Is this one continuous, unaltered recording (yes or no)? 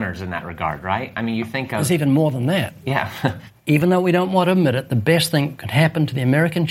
no